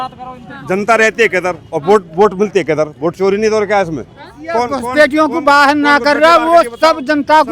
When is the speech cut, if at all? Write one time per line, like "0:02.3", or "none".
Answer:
0:04.3